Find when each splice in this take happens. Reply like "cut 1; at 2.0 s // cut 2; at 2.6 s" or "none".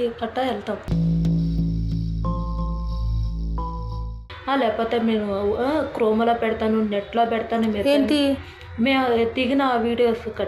cut 1; at 4.2 s